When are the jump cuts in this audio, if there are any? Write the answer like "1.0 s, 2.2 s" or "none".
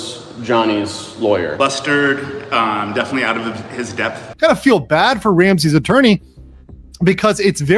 4.3 s